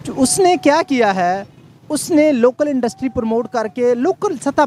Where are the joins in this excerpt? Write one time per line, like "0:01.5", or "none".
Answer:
none